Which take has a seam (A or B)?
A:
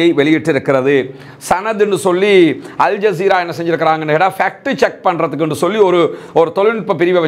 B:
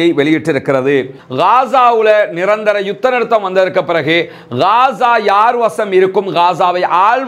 B